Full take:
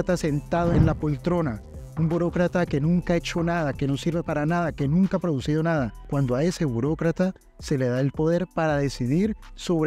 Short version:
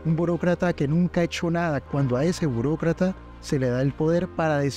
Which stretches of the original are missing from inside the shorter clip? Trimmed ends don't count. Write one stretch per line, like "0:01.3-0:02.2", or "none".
0:03.8-0:06.0